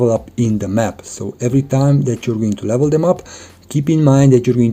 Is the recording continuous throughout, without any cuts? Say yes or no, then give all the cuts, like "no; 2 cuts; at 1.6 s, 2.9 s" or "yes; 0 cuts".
yes; 0 cuts